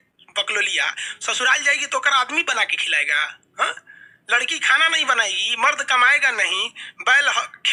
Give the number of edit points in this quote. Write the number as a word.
zero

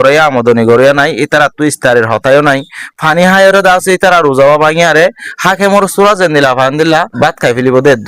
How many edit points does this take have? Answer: one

